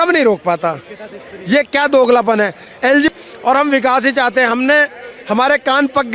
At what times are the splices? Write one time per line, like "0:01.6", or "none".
0:03.1